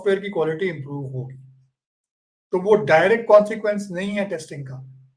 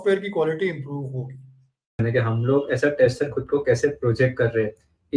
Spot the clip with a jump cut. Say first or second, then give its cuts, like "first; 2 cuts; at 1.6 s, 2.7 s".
second; 1 cut; at 2.0 s